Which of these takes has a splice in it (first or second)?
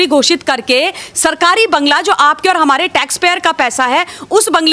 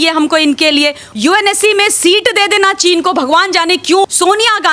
second